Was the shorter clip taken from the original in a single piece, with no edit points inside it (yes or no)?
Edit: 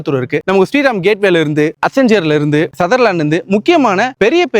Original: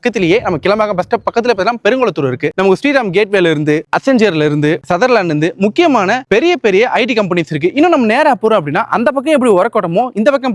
yes